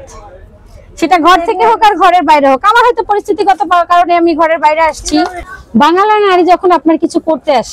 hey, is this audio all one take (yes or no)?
no